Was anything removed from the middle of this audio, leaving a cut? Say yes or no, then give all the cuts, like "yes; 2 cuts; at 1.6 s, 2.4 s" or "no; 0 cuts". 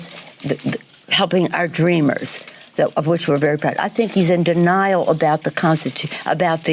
yes; 2 cuts; at 3.8 s, 5.0 s